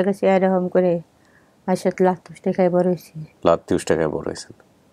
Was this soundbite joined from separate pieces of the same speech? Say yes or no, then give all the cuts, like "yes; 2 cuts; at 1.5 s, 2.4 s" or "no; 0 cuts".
no; 0 cuts